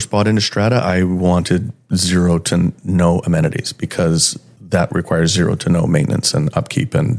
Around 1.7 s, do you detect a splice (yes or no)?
no